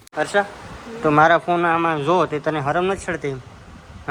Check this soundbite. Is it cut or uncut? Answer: uncut